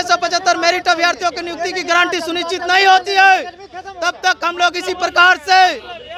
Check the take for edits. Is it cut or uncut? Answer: uncut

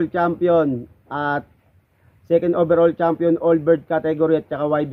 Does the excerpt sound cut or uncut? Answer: uncut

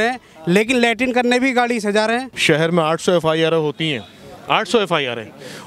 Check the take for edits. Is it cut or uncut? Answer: cut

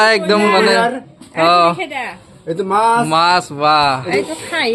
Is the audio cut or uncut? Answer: uncut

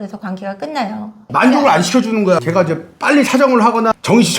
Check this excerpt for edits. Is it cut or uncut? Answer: cut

